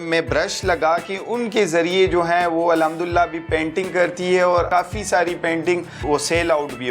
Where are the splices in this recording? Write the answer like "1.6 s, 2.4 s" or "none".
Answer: 4.7 s, 5.9 s